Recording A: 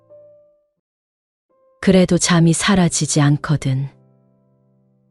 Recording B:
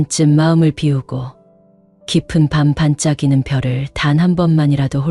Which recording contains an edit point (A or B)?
A